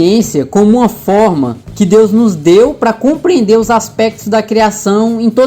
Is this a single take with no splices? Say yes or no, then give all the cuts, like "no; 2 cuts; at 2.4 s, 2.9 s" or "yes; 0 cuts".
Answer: yes; 0 cuts